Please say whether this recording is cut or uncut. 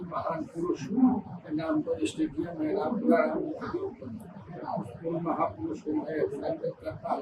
uncut